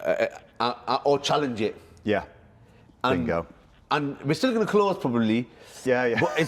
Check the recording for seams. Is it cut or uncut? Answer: uncut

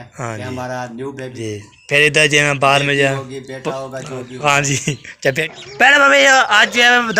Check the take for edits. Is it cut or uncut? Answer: cut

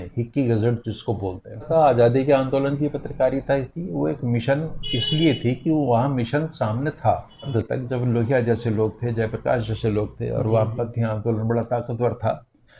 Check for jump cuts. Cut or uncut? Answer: cut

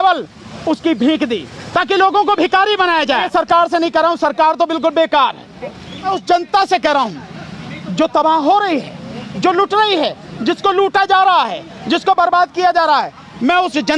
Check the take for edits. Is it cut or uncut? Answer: cut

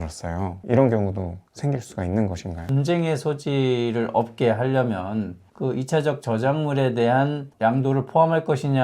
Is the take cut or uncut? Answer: cut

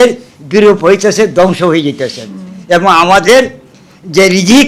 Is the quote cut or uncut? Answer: uncut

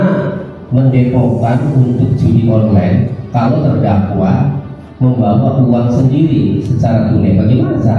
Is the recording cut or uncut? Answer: uncut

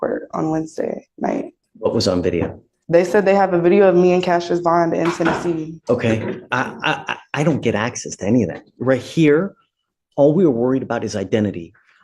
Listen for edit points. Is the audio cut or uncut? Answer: cut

